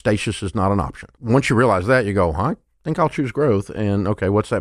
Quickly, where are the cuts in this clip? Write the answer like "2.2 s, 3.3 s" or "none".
1.1 s

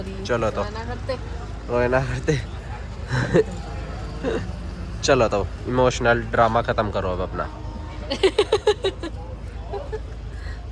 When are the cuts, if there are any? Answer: none

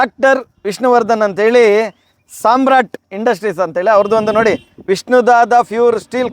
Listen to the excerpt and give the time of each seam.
none

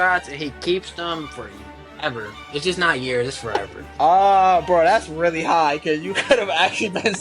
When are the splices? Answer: 3.8 s

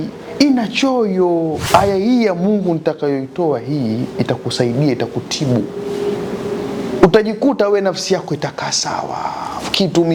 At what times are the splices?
1.6 s

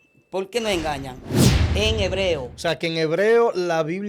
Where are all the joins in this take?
1.4 s

